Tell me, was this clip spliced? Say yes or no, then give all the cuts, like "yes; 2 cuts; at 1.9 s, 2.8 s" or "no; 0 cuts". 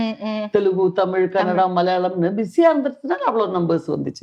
no; 0 cuts